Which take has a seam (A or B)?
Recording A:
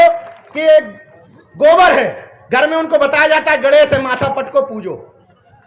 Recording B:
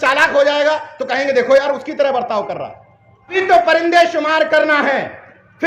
B